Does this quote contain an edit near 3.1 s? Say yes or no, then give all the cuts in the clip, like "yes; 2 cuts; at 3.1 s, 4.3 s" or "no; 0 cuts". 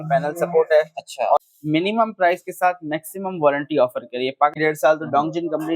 no; 2 cuts; at 1.4 s, 4.6 s